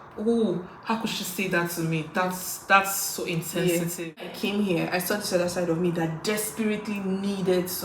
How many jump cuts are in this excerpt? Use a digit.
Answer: 1